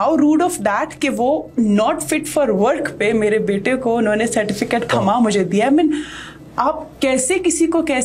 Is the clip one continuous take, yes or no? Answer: yes